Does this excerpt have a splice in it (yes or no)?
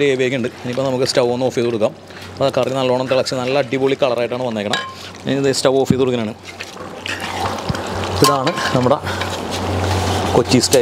no